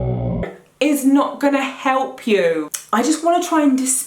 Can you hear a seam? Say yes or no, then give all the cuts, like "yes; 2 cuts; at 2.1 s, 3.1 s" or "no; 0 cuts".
yes; 1 cut; at 2.6 s